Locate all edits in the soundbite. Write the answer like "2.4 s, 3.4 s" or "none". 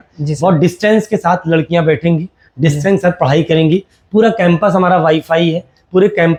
none